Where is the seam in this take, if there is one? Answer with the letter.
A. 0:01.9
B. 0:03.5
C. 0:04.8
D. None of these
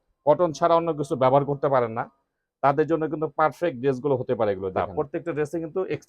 C